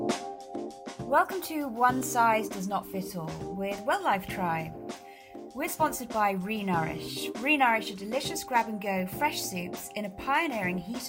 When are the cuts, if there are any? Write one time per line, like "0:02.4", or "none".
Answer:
0:01.0